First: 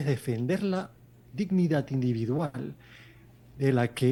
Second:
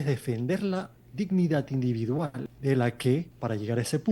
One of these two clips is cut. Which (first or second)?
second